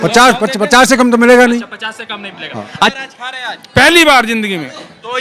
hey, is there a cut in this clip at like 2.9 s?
yes; 1 cut; at 2.9 s

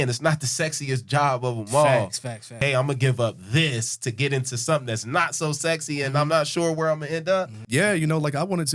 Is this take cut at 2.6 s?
yes; 2 cuts; at 2.6 s, 7.6 s

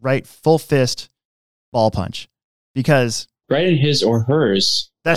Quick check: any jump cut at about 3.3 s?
yes; 1 cut; at 3.3 s

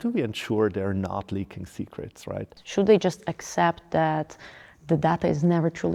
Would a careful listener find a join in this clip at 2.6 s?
yes; 1 cut; at 2.6 s

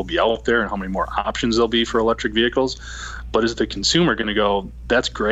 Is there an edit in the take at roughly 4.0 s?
no; 0 cuts

